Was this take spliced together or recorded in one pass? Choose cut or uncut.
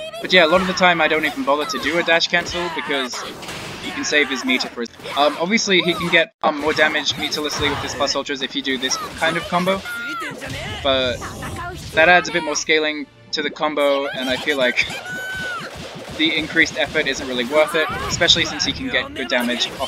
cut